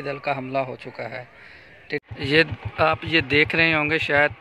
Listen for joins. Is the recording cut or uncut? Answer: cut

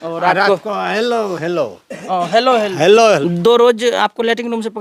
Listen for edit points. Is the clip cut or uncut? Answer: cut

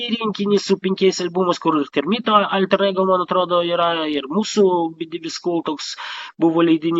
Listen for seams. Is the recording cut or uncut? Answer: uncut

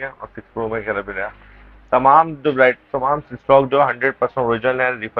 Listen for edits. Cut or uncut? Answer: uncut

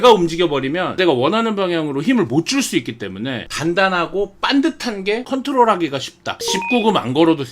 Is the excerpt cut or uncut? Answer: cut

